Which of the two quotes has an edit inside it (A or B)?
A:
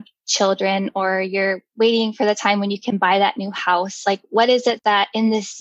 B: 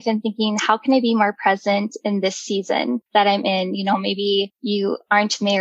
B